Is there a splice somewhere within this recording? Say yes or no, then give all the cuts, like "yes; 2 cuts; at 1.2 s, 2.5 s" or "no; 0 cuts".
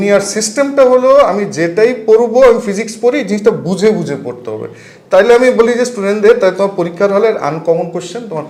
no; 0 cuts